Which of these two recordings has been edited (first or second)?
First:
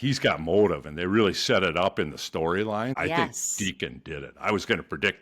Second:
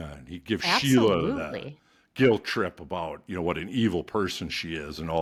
first